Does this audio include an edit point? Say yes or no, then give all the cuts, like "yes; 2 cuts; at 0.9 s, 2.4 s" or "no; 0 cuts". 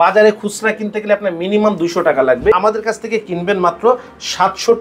yes; 1 cut; at 2.6 s